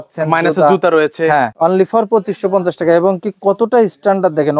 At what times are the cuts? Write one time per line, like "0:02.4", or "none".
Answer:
0:01.5